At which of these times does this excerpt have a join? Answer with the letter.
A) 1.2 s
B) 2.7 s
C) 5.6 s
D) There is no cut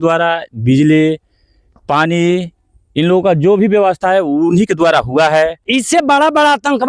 C